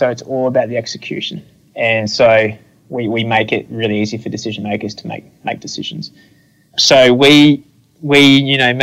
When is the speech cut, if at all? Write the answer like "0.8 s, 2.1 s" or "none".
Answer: 1.3 s, 6.8 s